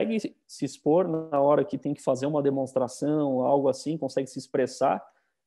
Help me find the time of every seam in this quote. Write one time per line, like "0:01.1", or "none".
none